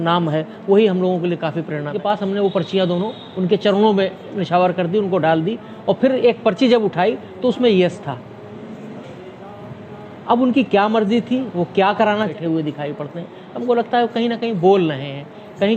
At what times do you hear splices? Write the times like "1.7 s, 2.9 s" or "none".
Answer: 2.0 s, 12.3 s